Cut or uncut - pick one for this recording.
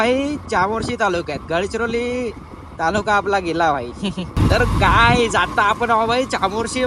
cut